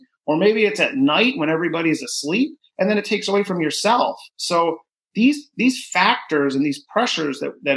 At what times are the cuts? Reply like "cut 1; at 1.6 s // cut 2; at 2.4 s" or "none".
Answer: none